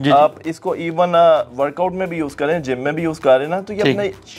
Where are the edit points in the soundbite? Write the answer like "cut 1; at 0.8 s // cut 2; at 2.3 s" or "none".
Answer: none